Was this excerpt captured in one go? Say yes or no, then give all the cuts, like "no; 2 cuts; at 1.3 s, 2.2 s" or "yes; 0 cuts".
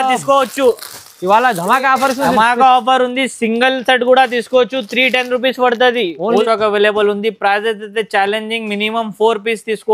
no; 1 cut; at 6.4 s